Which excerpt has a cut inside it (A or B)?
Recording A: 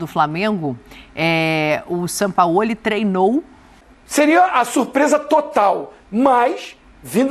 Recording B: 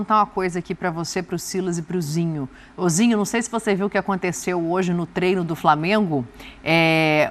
A